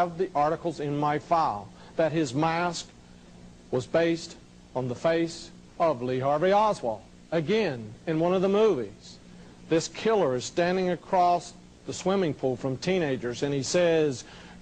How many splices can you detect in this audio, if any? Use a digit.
0